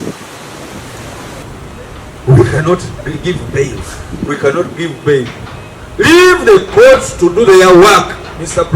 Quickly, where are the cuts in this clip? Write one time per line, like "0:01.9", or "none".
0:01.4